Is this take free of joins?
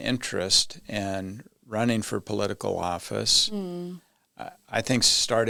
yes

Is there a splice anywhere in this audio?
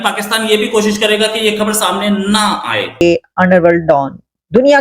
yes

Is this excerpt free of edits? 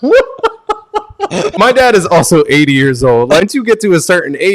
no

